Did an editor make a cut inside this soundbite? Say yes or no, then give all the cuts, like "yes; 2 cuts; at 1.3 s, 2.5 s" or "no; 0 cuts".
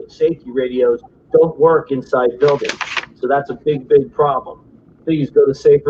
no; 0 cuts